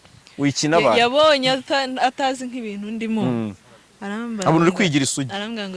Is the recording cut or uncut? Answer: uncut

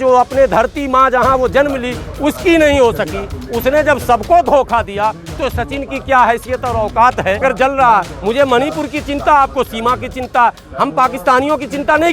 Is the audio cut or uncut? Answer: cut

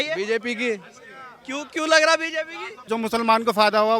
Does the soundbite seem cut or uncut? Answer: cut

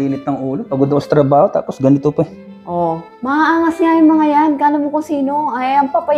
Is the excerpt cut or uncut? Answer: uncut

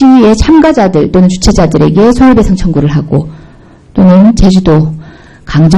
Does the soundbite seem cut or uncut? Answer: uncut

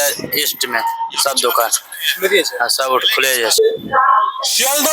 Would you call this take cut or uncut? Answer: cut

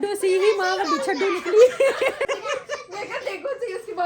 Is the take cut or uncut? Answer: cut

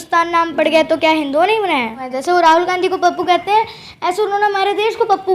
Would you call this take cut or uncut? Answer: cut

